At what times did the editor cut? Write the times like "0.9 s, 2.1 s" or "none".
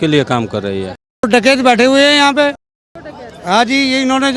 1.1 s